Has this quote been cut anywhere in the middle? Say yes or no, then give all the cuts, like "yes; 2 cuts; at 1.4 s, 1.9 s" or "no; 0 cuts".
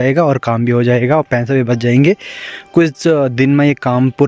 no; 0 cuts